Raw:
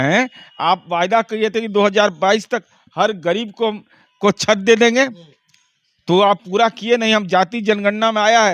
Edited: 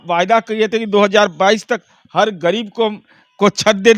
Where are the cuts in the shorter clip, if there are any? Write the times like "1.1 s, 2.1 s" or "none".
none